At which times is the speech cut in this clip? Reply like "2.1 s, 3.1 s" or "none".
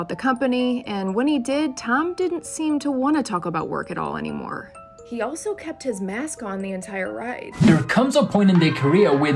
7.6 s